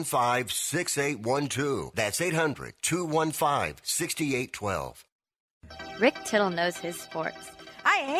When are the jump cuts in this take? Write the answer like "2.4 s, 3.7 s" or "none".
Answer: 5.4 s